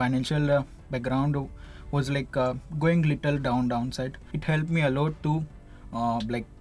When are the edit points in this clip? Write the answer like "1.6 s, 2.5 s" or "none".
4.2 s